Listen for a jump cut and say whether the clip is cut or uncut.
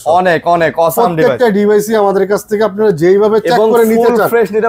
uncut